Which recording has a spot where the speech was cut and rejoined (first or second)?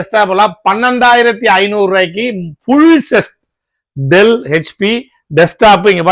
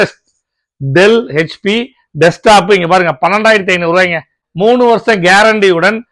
second